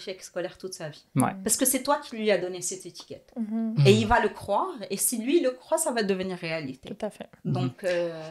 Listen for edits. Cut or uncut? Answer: uncut